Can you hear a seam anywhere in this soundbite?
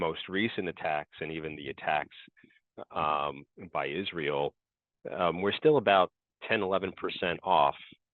no; 0 cuts

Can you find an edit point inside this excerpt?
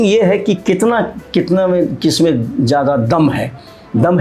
no; 0 cuts

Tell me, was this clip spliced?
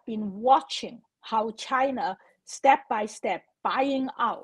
no; 0 cuts

